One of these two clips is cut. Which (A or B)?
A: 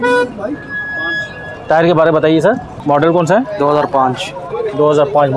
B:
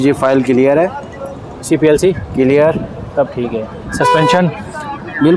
A